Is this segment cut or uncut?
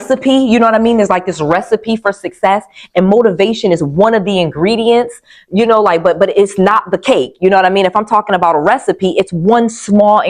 uncut